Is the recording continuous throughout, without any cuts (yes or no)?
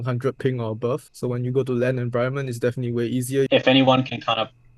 no